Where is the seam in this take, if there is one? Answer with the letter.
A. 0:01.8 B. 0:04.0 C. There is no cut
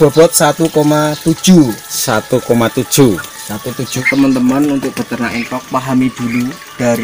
B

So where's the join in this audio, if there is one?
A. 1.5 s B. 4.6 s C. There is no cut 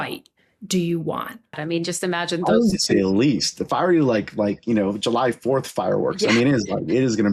A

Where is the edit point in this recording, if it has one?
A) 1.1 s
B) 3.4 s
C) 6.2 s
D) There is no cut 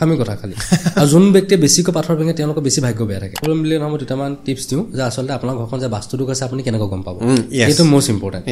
B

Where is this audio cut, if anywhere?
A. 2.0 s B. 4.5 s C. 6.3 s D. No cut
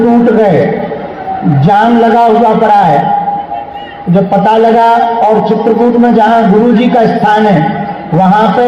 D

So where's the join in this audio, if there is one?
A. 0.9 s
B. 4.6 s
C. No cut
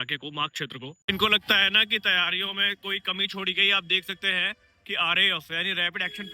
A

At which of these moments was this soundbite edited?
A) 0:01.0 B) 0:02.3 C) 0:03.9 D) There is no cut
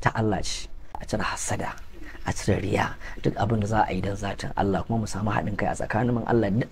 A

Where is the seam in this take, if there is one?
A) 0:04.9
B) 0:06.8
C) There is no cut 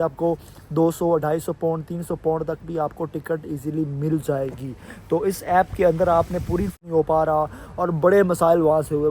B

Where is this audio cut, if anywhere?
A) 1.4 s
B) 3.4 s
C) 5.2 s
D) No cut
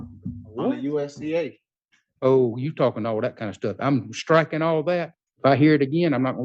C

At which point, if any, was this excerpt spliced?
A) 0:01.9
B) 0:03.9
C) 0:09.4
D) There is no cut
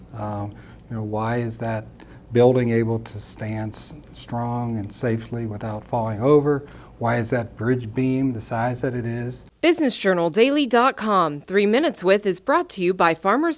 C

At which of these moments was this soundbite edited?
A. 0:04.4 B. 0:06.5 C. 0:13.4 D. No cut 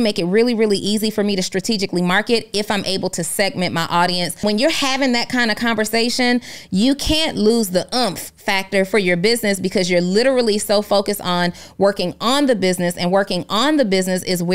A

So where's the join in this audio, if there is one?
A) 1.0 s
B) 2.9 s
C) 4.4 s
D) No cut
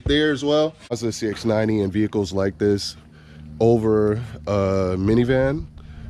A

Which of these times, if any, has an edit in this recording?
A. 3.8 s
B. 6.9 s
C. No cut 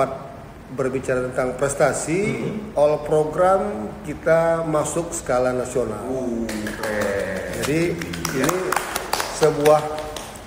C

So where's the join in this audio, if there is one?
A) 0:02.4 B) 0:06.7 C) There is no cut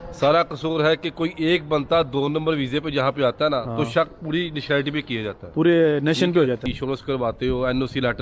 B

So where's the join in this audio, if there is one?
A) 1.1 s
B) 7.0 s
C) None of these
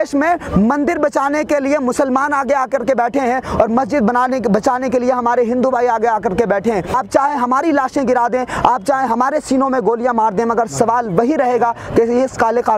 B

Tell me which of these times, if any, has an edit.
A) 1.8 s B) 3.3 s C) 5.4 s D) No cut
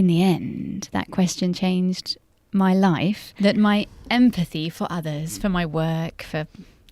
B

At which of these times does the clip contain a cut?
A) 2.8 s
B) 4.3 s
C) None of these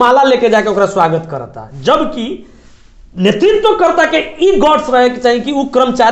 C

